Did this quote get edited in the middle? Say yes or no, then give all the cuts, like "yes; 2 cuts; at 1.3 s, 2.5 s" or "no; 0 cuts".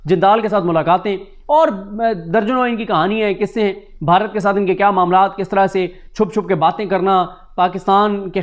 no; 0 cuts